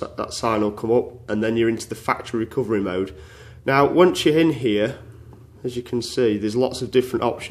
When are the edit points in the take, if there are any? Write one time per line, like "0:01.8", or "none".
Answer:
none